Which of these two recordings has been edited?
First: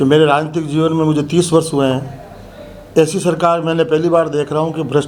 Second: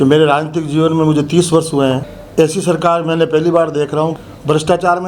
second; 2 cuts; at 2.1 s, 4.2 s

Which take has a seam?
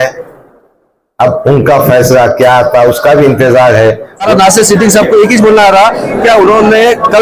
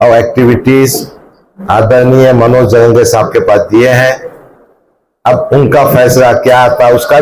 first; 1 cut; at 4.3 s

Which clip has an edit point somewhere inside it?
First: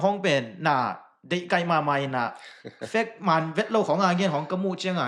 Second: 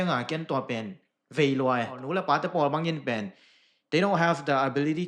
second; 1 cut; at 2.0 s

